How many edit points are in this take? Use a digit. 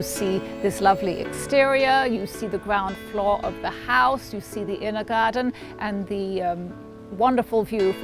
0